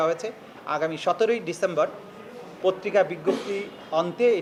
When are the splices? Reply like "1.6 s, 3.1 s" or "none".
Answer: none